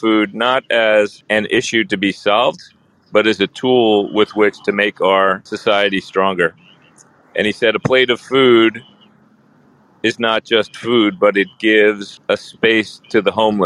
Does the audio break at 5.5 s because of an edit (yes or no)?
yes